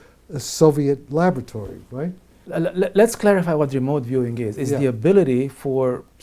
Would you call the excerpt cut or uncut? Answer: uncut